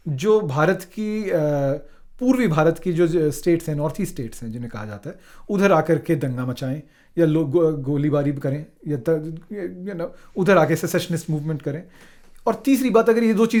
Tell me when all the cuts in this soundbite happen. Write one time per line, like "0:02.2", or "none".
none